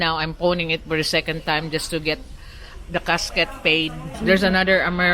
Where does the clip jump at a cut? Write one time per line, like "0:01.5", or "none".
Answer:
0:04.1